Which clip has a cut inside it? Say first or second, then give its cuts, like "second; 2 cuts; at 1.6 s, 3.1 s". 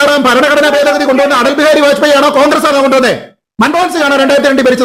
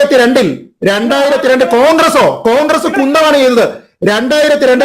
second; 1 cut; at 3.8 s